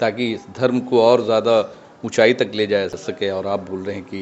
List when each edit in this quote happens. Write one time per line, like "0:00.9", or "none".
0:02.9